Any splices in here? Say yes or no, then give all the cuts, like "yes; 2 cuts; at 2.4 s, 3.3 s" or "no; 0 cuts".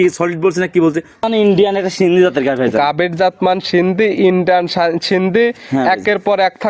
yes; 1 cut; at 1.2 s